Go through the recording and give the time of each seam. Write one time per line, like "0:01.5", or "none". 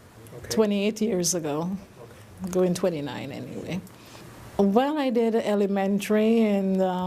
0:02.8